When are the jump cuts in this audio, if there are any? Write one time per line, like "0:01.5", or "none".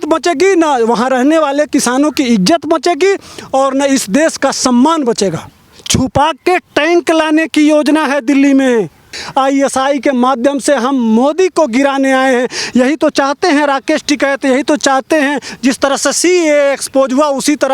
0:05.5
0:09.2
0:15.5